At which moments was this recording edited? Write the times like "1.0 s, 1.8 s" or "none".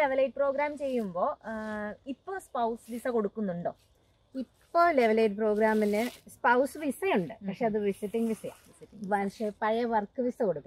none